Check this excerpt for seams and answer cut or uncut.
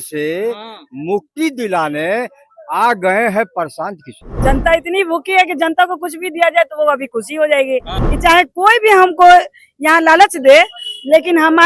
cut